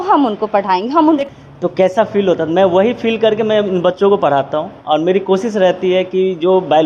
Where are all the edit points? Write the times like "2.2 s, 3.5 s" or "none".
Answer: 1.2 s

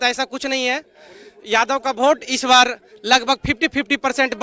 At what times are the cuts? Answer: none

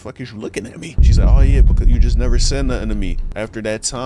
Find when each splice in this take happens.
1.0 s, 3.2 s

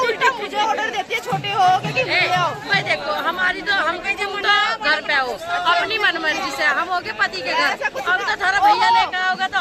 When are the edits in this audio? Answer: none

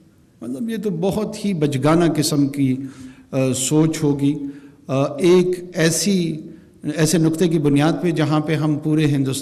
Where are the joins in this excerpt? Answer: none

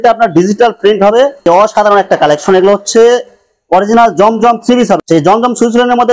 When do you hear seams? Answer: 1.4 s, 5.0 s

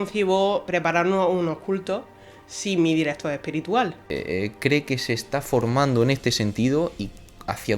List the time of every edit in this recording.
4.0 s

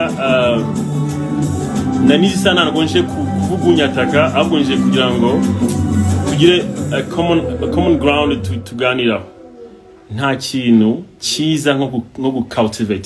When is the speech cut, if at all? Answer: none

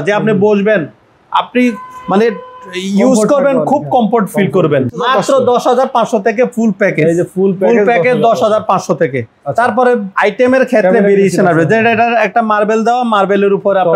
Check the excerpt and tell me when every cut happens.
5.0 s, 10.1 s

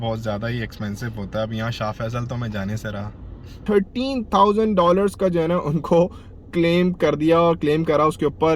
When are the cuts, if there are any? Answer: 3.6 s

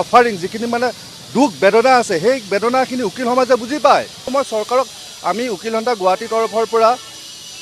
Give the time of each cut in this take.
4.3 s

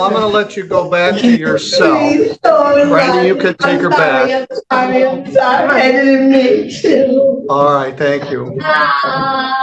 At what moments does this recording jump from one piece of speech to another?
none

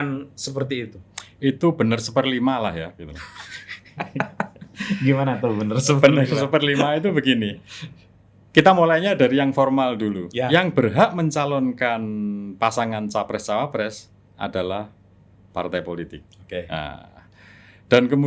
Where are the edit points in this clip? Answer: none

